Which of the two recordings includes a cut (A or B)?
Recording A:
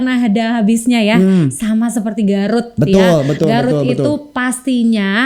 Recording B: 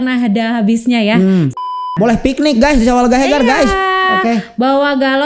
B